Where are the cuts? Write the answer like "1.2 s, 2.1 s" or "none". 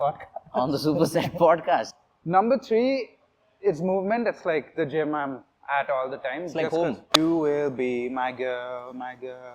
1.9 s, 7.0 s